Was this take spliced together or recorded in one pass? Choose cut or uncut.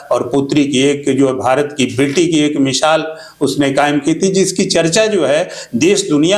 uncut